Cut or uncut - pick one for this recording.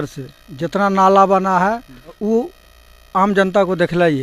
cut